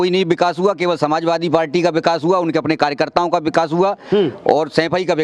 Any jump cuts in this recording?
no; 0 cuts

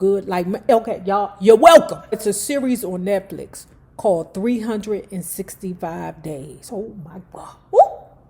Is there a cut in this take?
yes; 1 cut; at 2.2 s

